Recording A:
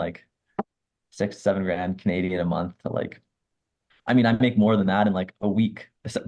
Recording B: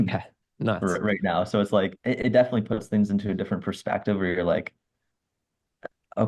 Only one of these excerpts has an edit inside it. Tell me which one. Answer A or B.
B